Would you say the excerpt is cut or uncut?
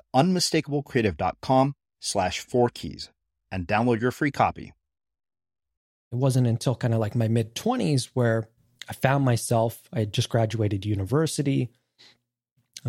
cut